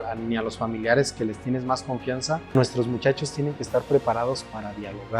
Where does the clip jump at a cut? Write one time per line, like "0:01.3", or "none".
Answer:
0:02.5